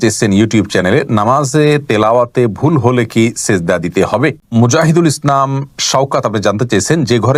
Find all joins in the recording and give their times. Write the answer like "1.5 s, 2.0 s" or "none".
4.4 s